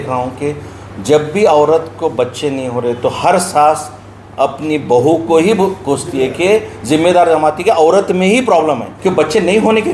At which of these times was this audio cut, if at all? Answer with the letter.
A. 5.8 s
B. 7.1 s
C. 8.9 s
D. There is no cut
C